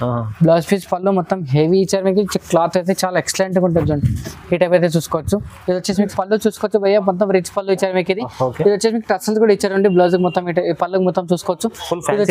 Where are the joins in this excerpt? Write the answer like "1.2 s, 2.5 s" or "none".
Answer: 6.1 s